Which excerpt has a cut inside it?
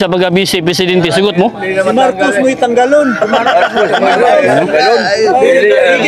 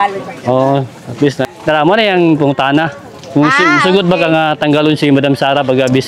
second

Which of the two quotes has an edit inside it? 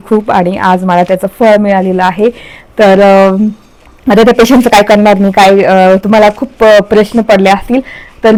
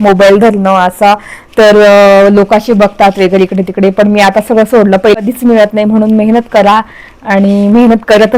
second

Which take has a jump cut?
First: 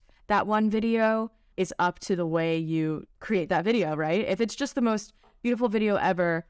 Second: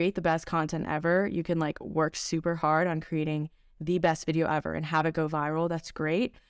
first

